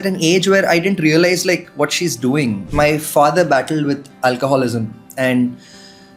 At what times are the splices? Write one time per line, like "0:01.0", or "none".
0:02.6